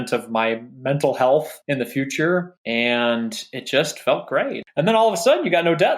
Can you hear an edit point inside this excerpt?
yes; 3 cuts; at 1.6 s, 2.6 s, 4.6 s

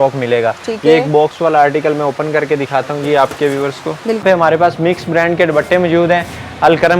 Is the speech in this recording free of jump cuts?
no; 1 cut; at 4.2 s

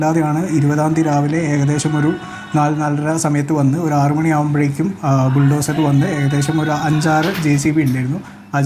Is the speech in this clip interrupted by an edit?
no; 0 cuts

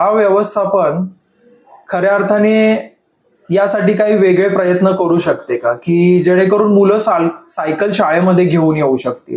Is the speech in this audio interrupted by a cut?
no; 0 cuts

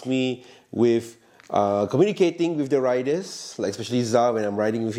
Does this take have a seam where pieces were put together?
no; 0 cuts

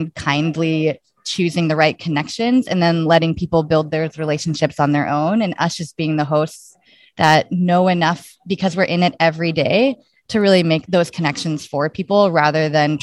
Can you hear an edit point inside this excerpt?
yes; 1 cut; at 10.8 s

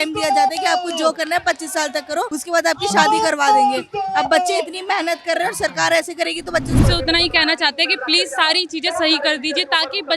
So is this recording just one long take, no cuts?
no; 2 cuts; at 2.4 s, 6.8 s

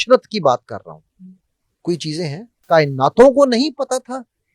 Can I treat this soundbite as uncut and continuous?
no; 1 cut; at 2.6 s

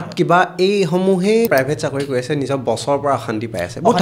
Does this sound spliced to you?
yes; 1 cut; at 1.5 s

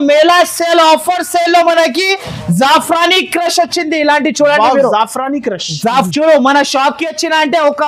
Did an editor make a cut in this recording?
yes; 1 cut; at 6.1 s

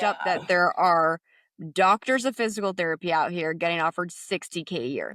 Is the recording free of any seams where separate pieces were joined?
yes; 0 cuts

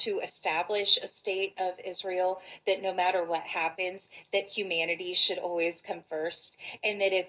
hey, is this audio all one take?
yes; 0 cuts

